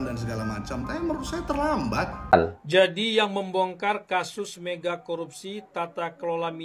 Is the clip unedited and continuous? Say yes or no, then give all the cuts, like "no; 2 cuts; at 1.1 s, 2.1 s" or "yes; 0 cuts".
no; 1 cut; at 2.6 s